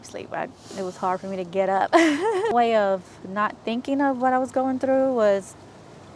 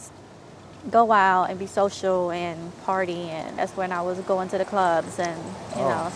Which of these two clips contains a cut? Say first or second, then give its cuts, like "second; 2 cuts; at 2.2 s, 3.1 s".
first; 1 cut; at 2.5 s